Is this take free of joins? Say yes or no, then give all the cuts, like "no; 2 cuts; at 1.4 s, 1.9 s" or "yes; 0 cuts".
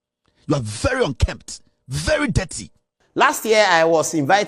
no; 1 cut; at 2.9 s